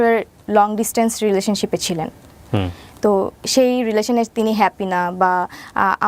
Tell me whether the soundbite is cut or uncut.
uncut